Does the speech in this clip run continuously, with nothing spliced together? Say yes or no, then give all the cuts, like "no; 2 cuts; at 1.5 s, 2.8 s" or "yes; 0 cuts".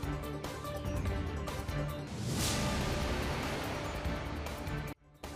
no; 1 cut; at 1.3 s